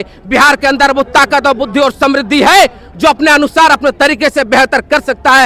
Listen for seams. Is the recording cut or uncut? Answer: uncut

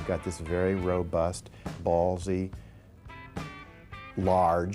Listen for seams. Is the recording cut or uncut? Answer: cut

